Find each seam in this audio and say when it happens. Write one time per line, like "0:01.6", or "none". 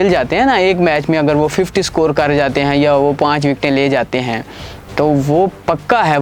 none